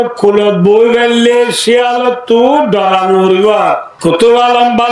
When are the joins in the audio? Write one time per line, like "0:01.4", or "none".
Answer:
0:03.9